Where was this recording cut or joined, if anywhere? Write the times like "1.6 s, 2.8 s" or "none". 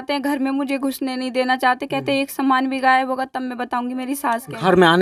none